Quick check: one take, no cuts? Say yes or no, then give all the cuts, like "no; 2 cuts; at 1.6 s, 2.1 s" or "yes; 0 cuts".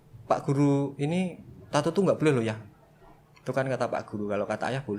yes; 0 cuts